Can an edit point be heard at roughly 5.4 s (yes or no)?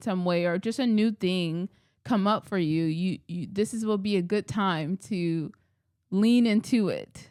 no